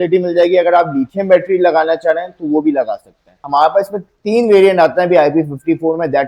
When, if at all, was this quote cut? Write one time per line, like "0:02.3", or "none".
0:03.4